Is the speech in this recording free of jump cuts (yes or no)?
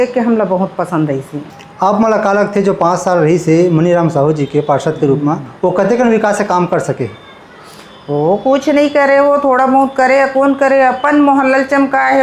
no